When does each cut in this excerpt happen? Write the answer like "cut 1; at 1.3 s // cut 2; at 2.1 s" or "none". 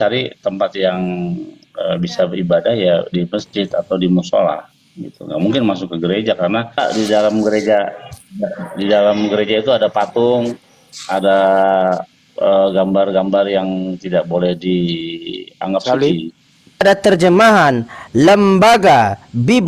cut 1; at 6.8 s // cut 2; at 16.8 s